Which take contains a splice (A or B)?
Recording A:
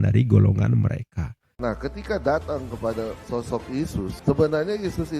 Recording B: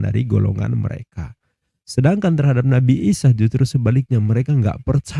A